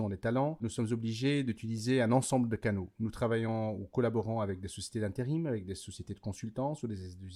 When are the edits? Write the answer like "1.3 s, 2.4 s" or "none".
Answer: none